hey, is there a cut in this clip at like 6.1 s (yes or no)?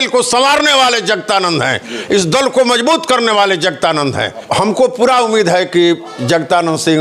no